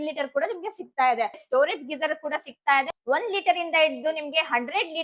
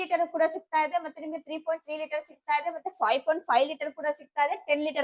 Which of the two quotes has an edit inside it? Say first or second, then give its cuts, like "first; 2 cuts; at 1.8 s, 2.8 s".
first; 2 cuts; at 1.4 s, 2.9 s